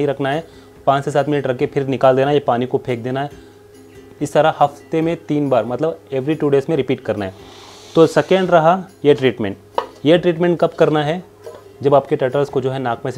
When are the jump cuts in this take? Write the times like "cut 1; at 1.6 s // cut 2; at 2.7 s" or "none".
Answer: none